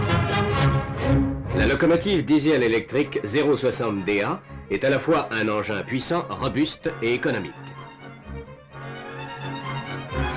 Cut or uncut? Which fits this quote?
uncut